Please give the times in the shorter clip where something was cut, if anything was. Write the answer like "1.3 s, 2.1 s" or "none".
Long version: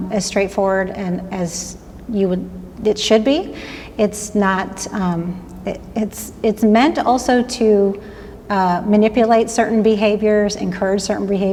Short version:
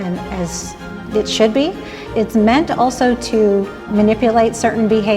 0.9 s, 2.0 s, 3.9 s